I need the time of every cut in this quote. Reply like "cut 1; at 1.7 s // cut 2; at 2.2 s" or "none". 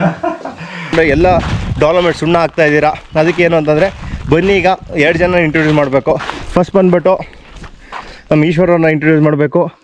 cut 1; at 0.9 s